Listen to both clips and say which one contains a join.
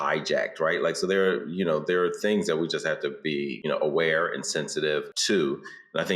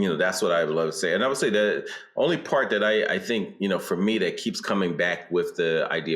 first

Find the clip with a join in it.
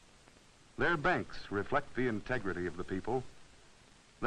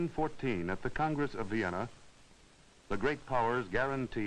second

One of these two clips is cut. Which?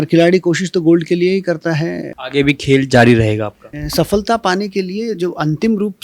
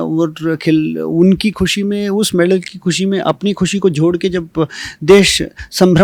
first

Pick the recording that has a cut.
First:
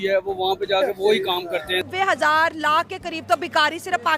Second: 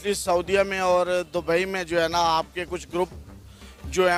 first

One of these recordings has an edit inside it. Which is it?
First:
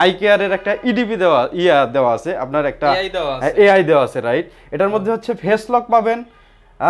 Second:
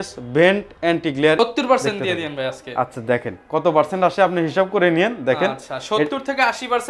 second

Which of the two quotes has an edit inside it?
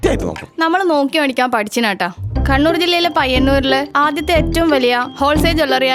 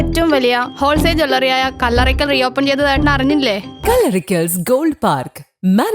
second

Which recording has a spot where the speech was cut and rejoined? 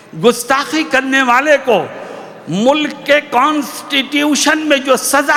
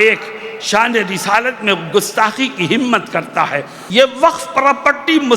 second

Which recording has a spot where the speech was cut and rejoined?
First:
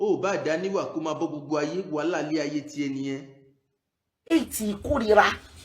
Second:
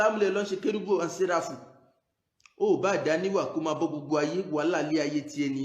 first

